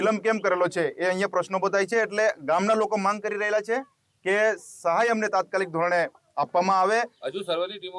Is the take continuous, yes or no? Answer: yes